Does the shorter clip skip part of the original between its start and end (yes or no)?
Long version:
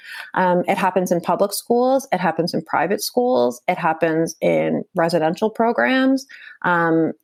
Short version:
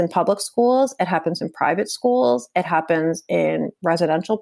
no